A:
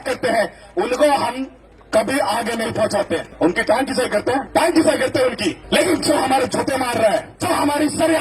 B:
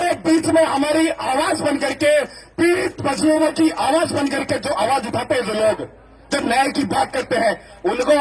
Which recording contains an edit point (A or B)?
A